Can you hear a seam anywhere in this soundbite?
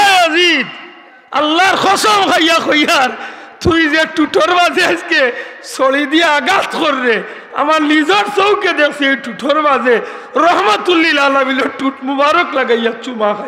no; 0 cuts

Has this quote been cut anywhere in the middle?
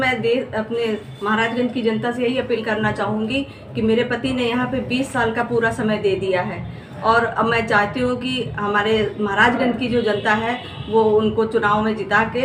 no; 0 cuts

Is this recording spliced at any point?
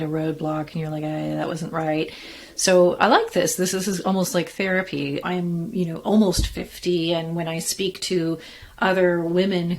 yes; 2 cuts; at 3.7 s, 5.2 s

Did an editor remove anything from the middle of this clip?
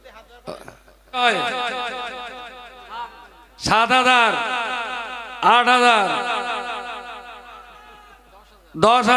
yes; 1 cut; at 1.2 s

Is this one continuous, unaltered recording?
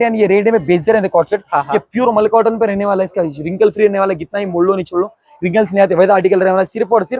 yes; 0 cuts

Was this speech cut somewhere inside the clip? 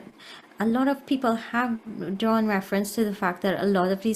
no; 0 cuts

